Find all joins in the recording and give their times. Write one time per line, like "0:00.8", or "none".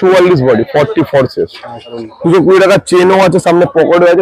0:02.0